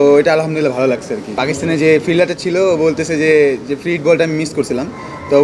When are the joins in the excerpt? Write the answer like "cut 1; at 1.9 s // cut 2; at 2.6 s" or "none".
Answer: cut 1; at 1.2 s